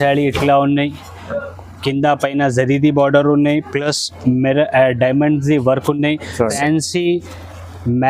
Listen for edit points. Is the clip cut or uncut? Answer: cut